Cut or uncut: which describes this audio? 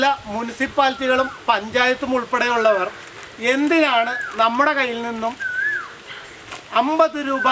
uncut